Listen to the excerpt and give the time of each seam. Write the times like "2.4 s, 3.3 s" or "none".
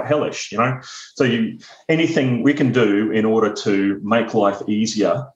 none